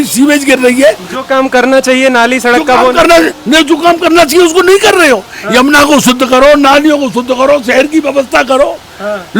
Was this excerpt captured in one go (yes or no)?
no